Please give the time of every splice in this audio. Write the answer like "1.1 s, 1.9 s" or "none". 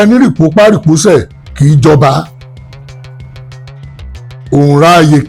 2.9 s, 4.5 s